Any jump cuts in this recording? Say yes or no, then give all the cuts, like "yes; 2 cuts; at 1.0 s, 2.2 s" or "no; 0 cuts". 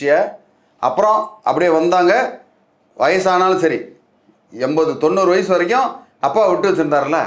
no; 0 cuts